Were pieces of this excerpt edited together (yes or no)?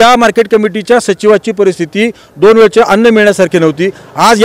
no